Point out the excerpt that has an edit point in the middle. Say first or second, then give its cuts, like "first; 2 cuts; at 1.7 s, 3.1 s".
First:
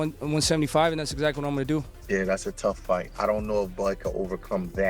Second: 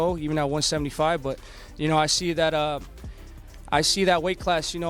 first; 1 cut; at 1.6 s